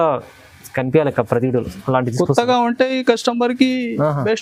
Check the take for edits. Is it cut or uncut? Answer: uncut